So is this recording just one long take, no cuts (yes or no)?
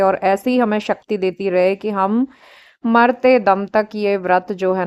yes